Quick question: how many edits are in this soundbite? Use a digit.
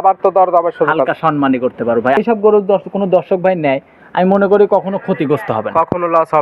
1